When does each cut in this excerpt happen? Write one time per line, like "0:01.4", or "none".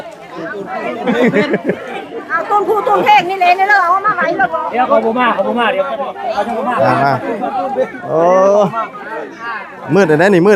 none